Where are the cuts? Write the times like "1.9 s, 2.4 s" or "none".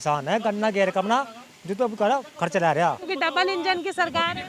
3.1 s